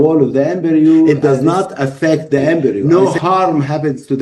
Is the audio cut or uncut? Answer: cut